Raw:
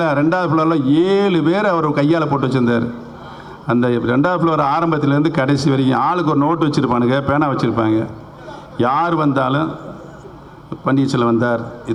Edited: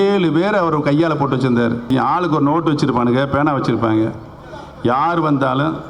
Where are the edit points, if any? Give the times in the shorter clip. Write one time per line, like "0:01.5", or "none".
0:01.9